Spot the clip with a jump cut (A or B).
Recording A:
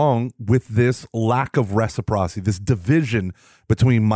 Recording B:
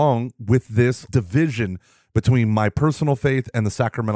B